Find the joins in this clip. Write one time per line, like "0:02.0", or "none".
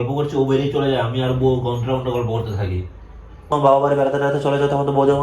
0:03.5